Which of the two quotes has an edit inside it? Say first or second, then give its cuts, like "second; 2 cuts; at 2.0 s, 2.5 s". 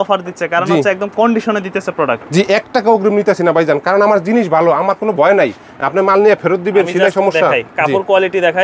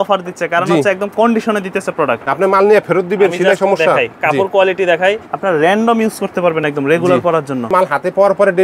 second; 3 cuts; at 2.2 s, 5.3 s, 7.7 s